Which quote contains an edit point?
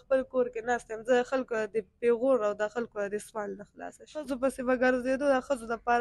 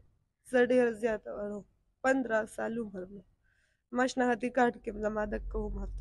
first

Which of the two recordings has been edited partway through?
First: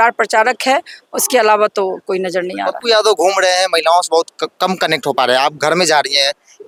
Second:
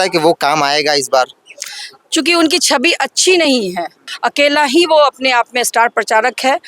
second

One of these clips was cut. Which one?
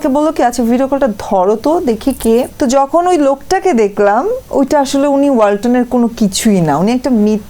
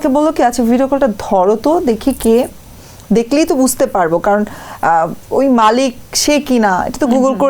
first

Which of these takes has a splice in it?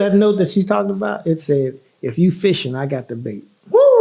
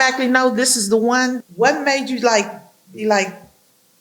second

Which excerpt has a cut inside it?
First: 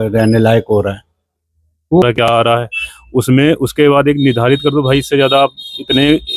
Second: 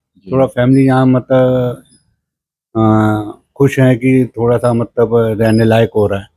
first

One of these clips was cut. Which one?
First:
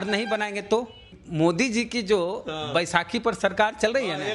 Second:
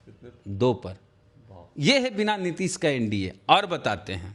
first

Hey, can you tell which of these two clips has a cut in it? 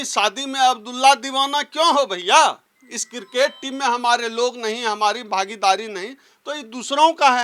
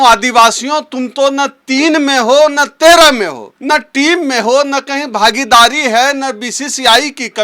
second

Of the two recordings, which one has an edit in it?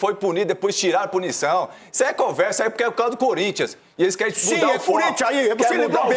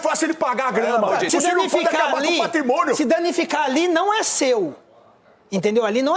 second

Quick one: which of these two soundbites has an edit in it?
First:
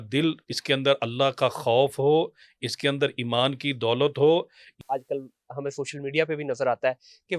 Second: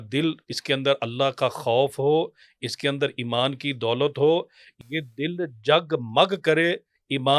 first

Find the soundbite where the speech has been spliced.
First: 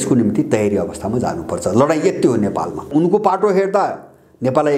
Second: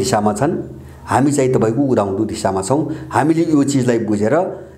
first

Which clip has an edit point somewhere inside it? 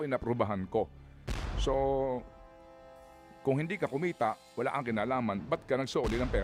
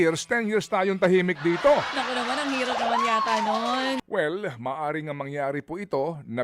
second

